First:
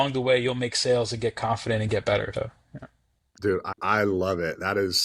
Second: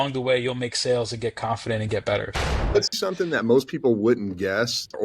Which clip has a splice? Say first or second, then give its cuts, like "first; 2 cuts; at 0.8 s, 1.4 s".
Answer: second; 1 cut; at 2.7 s